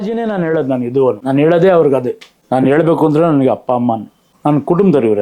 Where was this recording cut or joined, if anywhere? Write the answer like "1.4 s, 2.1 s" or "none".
1.2 s, 2.3 s, 4.3 s